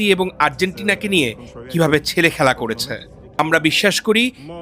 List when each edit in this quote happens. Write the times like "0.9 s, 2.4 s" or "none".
3.4 s

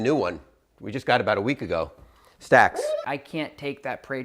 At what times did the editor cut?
3.0 s

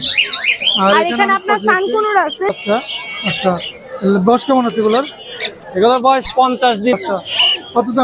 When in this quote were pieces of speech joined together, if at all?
2.5 s, 6.9 s

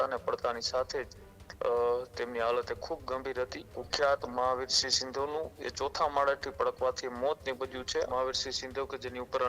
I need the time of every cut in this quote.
3.8 s, 8.1 s

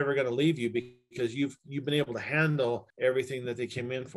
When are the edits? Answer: 2.9 s

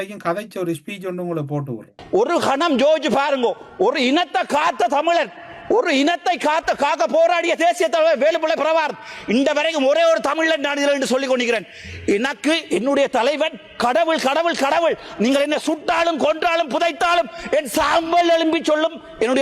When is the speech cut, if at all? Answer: none

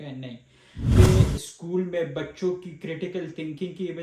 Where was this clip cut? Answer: 1.0 s

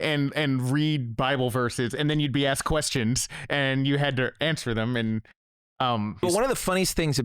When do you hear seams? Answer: 6.2 s

